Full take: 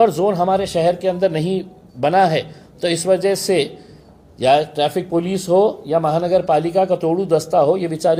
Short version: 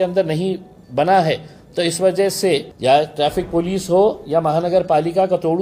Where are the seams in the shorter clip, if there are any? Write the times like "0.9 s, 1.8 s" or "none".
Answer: 2.7 s